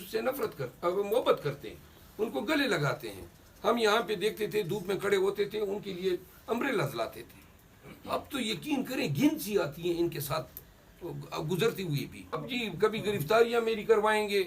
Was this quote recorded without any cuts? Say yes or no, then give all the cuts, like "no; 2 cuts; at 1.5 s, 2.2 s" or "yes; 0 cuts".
no; 1 cut; at 12.4 s